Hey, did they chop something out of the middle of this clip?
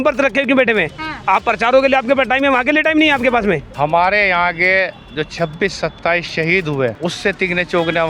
yes; 2 cuts; at 3.7 s, 7.0 s

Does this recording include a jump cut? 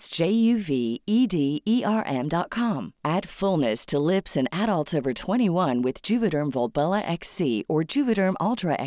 no; 0 cuts

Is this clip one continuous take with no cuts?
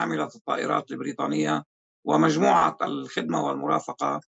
yes; 0 cuts

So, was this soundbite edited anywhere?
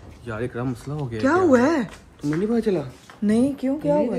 no; 0 cuts

